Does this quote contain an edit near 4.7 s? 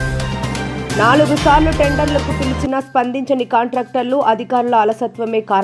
no; 1 cut; at 0.9 s

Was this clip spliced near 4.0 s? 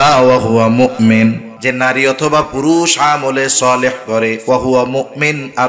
no; 1 cut; at 1.5 s

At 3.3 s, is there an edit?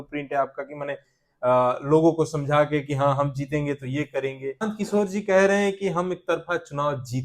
no; 1 cut; at 4.6 s

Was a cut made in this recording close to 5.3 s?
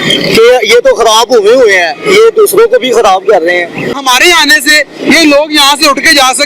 no; 1 cut; at 4.0 s

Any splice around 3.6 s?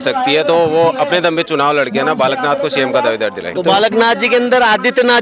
yes; 1 cut; at 3.6 s

